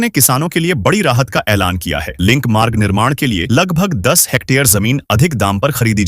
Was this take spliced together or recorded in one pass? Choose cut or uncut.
uncut